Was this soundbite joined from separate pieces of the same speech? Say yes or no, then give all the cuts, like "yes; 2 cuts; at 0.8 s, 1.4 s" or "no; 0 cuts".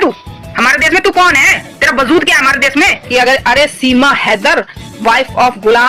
yes; 1 cut; at 3.0 s